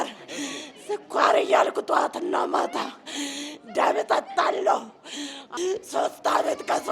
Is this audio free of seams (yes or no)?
no